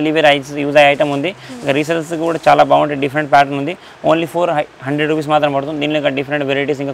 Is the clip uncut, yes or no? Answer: yes